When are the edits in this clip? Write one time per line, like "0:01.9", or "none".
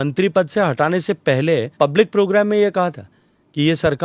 0:01.7